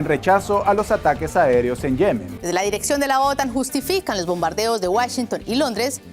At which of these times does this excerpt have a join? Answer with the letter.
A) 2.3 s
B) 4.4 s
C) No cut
A